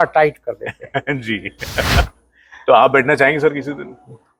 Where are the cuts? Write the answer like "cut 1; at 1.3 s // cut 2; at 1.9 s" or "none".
none